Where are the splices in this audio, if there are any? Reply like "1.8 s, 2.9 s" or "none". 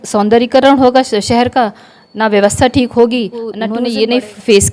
3.7 s